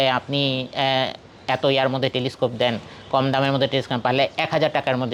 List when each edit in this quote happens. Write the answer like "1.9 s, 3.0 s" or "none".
none